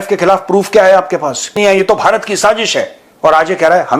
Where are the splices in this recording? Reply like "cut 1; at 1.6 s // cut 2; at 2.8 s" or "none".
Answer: cut 1; at 1.5 s